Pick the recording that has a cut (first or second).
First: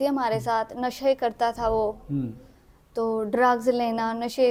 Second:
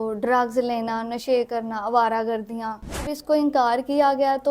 second